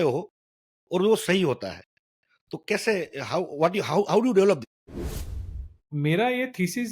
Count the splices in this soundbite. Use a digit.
1